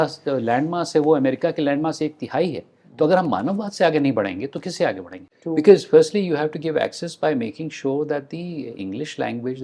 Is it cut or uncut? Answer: cut